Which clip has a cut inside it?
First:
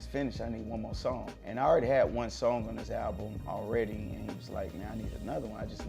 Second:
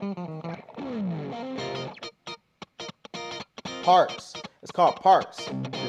first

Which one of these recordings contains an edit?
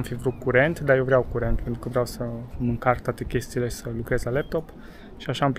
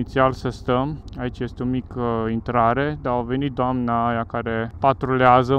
second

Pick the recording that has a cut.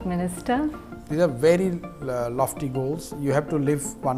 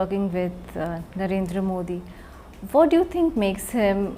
first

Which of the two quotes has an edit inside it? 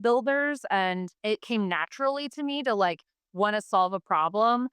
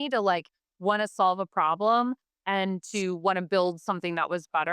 first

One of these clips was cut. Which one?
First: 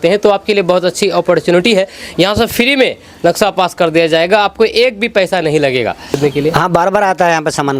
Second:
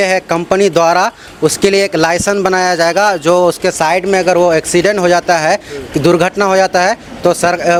first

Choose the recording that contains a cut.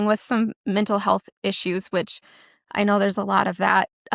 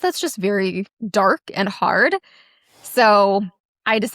second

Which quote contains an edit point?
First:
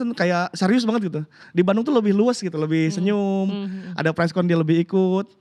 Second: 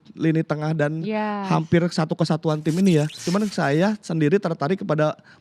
second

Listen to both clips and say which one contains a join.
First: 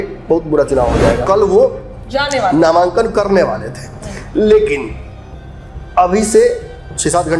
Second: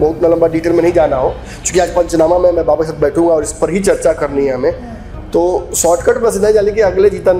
first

